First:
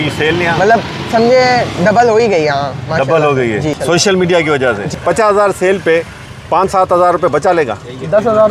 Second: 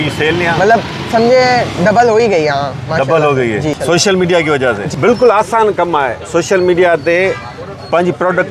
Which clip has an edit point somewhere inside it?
first; 1 cut; at 4.9 s

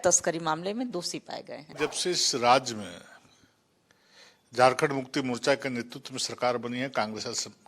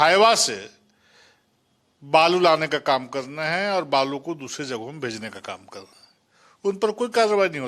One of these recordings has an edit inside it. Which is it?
first; 1 cut; at 1.6 s

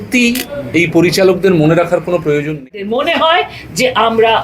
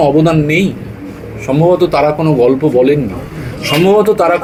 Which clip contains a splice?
first; 1 cut; at 2.9 s

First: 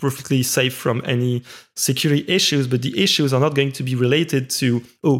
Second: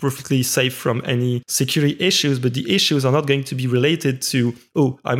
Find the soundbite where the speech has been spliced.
second; 1 cut; at 1.5 s

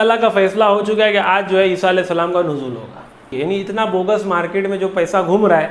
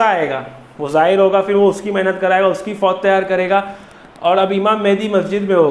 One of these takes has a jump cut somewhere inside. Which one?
first; 1 cut; at 3.3 s

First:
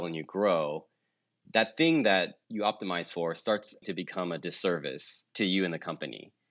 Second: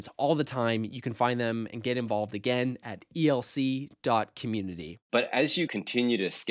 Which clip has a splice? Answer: second; 1 cut; at 4.9 s

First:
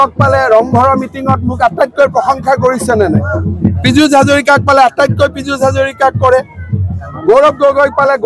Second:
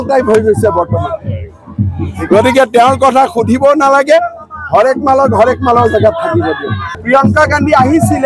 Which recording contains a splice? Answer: second; 1 cut; at 7.0 s

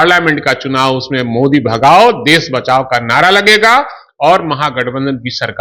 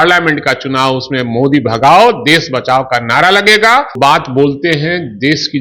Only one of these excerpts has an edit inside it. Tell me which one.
second; 1 cut; at 3.9 s

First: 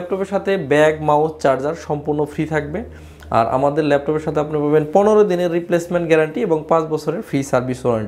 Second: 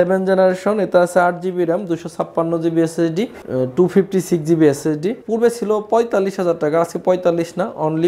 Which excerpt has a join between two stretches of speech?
second; 2 cuts; at 3.4 s, 5.2 s

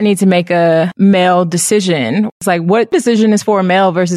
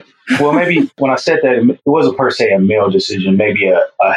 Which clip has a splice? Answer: first; 1 cut; at 0.9 s

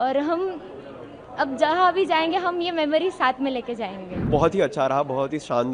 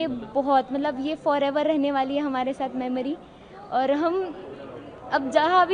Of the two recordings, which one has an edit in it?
first; 1 cut; at 4.3 s

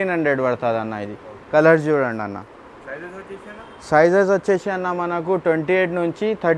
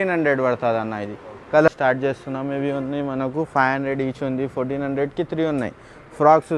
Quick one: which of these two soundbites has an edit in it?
second; 1 cut; at 1.7 s

